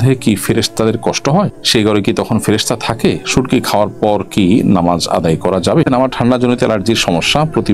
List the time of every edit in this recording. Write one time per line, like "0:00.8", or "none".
0:01.6
0:05.9